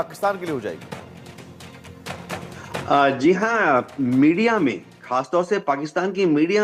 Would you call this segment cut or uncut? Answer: uncut